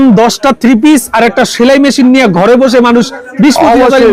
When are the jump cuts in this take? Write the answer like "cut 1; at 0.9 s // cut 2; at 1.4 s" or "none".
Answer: none